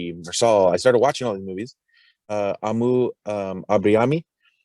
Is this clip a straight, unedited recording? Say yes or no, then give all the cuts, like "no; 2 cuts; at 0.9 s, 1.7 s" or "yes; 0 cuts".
no; 1 cut; at 2.1 s